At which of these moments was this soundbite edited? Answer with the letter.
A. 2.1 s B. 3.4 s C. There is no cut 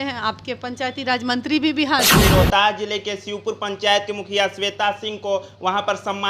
A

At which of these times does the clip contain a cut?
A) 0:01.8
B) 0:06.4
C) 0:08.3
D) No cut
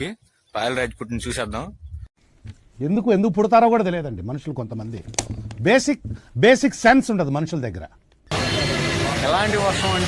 C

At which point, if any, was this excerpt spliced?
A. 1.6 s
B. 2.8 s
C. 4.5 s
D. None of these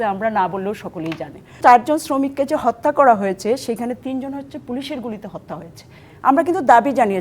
A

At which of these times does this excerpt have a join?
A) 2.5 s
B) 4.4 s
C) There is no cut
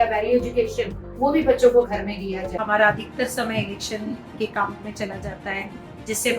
A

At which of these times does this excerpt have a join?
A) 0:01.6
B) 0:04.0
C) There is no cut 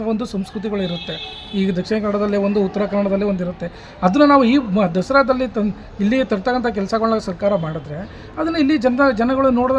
C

